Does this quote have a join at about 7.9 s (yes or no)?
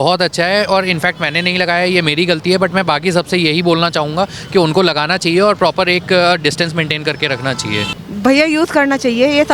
yes